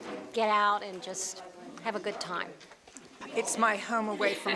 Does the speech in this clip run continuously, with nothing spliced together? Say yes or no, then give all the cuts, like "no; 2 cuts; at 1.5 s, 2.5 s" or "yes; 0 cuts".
no; 1 cut; at 3.1 s